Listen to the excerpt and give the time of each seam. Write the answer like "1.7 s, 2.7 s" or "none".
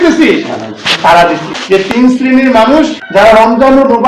1.9 s, 3.0 s